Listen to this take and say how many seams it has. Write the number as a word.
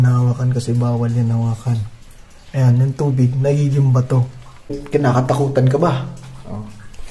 one